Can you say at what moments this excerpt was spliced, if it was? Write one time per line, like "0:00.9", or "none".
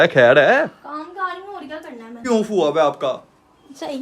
0:02.2